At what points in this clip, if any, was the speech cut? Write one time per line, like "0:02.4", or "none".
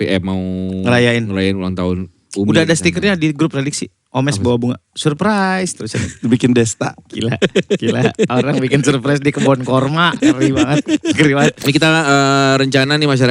0:11.6